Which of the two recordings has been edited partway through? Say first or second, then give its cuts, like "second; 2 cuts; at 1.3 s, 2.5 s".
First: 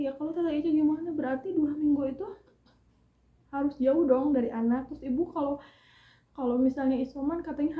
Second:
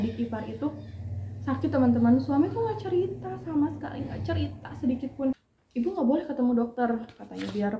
second; 1 cut; at 5.5 s